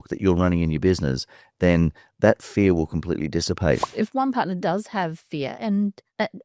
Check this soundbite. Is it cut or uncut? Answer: cut